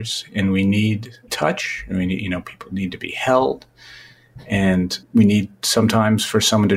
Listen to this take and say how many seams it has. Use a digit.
2